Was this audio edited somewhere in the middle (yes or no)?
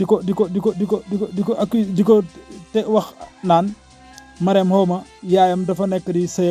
no